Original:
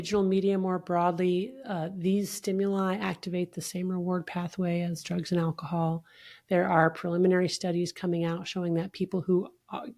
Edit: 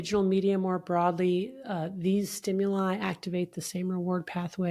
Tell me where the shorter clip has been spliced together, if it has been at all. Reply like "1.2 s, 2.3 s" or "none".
none